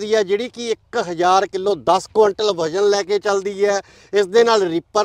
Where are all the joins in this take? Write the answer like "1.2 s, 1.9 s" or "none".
none